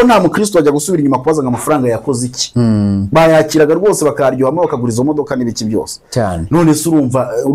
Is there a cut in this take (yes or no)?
no